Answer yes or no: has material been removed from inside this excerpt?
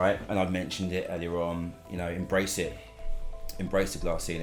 no